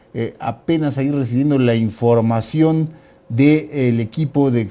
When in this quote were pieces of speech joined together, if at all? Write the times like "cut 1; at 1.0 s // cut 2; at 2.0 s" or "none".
cut 1; at 2.5 s